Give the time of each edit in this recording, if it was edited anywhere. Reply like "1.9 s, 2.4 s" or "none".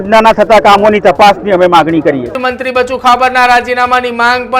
2.4 s